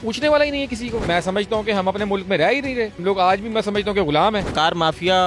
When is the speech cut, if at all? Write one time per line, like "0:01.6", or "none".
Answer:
0:01.1
0:03.0
0:04.5